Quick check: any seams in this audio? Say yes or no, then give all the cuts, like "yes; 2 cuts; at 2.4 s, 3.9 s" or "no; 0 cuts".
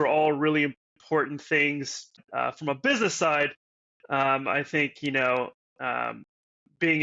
yes; 1 cut; at 2.2 s